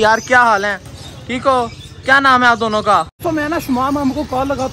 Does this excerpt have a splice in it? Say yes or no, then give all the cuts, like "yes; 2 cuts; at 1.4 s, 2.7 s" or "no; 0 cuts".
yes; 1 cut; at 3.1 s